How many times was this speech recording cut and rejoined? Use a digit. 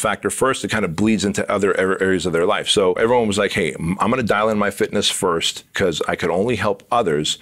2